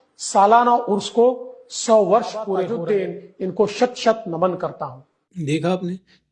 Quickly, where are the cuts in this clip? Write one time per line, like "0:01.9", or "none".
0:02.7